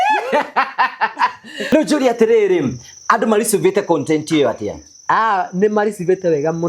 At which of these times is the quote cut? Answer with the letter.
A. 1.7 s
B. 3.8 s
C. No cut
A